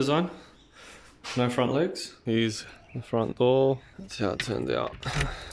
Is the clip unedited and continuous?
no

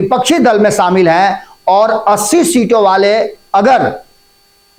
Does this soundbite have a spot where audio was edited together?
no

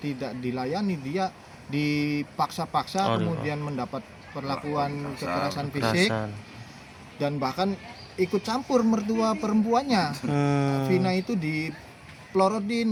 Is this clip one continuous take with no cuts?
yes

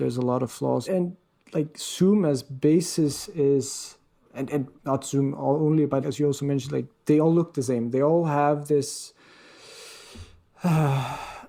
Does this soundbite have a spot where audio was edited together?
no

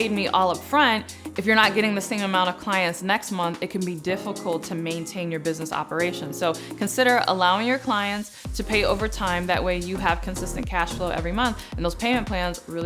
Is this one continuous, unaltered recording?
yes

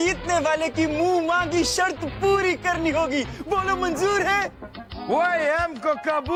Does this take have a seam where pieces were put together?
no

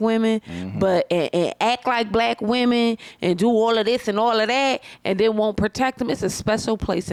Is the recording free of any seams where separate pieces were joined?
yes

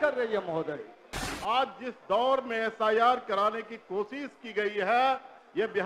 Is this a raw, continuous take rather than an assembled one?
no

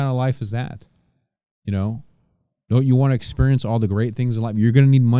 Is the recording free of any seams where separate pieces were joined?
yes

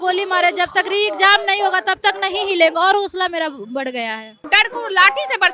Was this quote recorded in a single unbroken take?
no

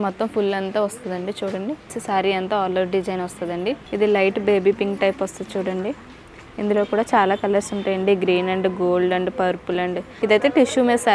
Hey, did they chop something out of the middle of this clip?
yes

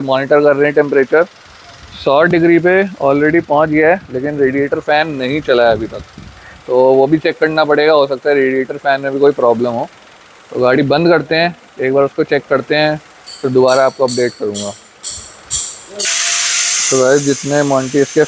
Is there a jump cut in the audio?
no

